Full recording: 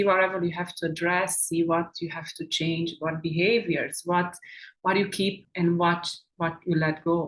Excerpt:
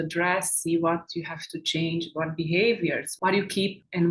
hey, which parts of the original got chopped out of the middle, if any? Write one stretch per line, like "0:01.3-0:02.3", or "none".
0:03.9-0:04.7